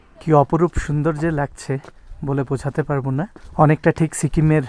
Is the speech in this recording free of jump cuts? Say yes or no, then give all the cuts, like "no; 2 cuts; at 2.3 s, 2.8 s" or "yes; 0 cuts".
yes; 0 cuts